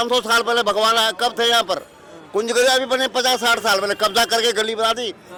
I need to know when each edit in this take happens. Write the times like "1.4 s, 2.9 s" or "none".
none